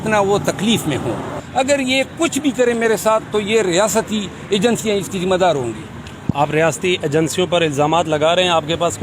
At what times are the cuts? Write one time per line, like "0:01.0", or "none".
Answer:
0:01.4